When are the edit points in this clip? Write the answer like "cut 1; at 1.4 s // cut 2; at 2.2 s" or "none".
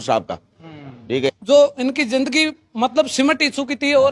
cut 1; at 1.3 s